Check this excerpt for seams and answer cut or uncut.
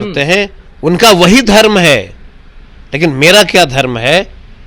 uncut